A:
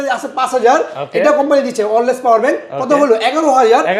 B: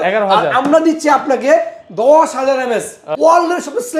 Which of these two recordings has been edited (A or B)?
B